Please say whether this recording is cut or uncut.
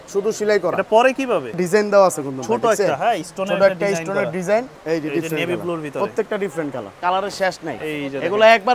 cut